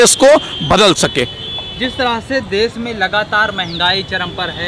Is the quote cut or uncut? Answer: uncut